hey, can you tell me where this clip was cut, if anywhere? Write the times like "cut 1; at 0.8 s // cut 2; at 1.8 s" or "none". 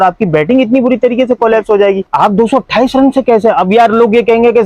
cut 1; at 2.1 s